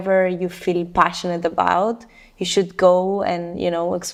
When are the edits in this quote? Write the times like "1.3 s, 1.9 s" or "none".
none